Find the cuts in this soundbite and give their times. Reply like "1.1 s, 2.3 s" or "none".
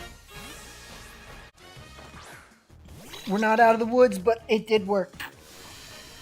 1.5 s